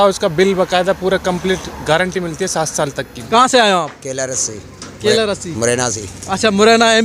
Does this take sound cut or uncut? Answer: cut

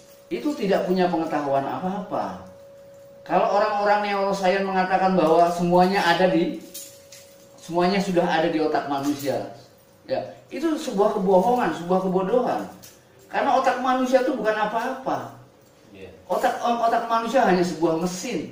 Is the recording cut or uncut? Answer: uncut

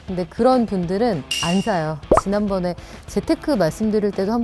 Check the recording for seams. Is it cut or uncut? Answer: cut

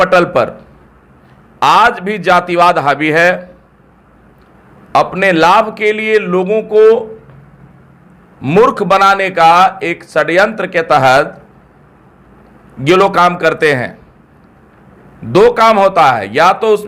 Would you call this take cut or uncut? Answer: uncut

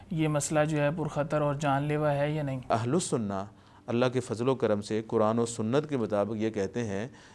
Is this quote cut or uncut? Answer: cut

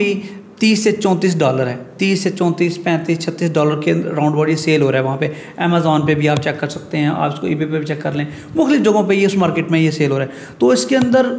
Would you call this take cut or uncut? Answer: uncut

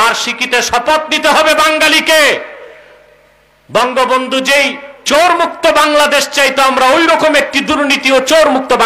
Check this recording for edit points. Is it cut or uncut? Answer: uncut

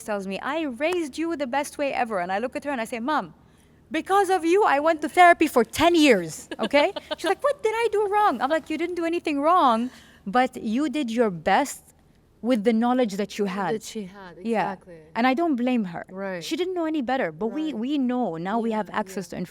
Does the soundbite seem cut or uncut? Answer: uncut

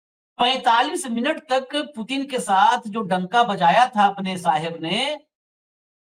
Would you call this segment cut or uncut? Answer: uncut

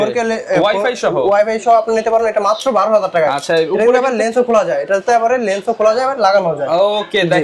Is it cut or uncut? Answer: uncut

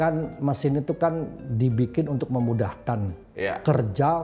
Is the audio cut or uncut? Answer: uncut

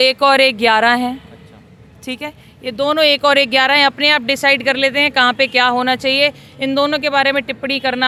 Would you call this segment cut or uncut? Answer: uncut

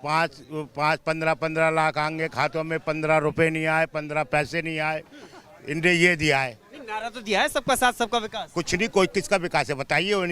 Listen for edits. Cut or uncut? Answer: uncut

